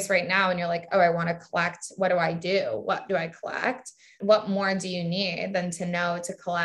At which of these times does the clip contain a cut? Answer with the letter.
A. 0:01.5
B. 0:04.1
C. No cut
B